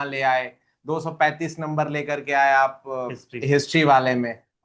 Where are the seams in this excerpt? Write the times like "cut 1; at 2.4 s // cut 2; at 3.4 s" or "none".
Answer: none

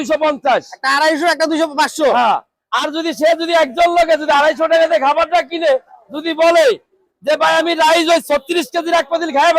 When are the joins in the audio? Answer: none

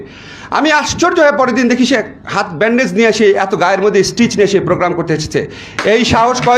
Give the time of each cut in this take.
none

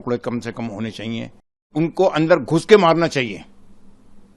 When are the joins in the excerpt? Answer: cut 1; at 1.7 s

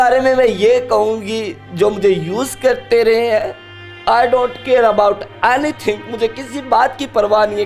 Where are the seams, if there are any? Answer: none

